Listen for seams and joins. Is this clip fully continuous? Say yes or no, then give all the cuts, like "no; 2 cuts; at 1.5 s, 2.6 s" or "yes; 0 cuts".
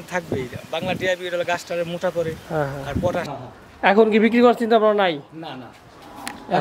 no; 1 cut; at 3.3 s